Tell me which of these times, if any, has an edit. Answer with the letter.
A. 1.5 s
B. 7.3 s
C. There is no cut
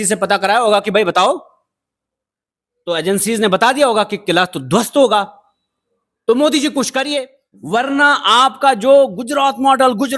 C